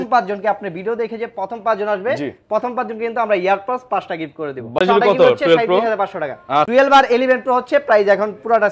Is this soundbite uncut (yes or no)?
no